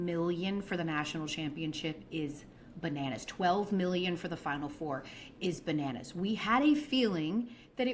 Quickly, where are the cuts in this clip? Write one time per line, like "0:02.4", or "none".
0:03.7

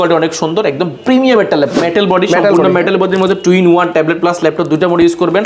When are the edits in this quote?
0:01.8

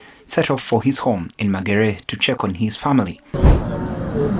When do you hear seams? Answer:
0:03.3

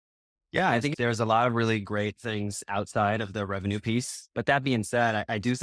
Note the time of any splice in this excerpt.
0:04.2

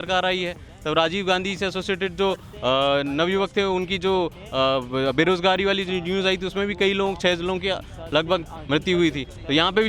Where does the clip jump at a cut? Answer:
none

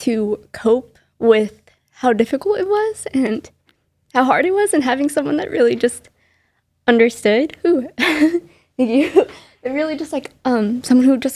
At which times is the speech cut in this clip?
none

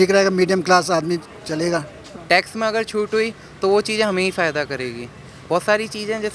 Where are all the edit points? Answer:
0:02.1

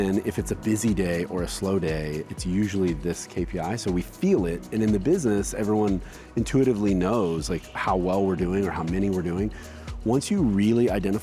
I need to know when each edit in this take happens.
none

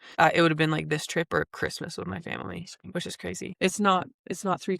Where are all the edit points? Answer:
0:03.5

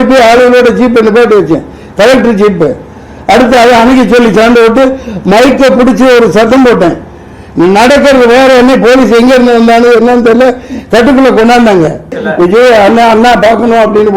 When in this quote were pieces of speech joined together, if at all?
0:12.2

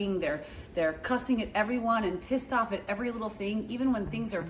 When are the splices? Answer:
none

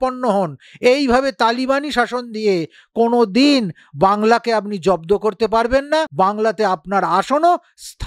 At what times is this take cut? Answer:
0:06.1

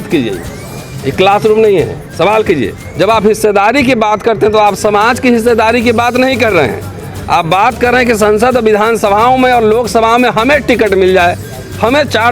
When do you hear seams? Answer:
0:02.8

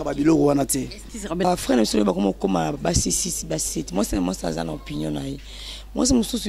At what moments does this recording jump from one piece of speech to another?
0:01.5

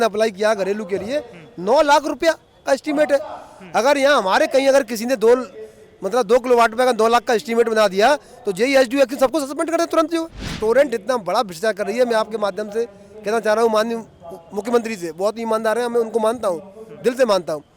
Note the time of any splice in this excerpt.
0:10.5

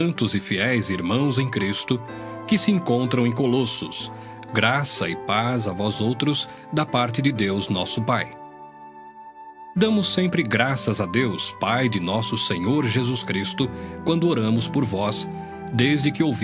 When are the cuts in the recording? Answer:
0:07.9

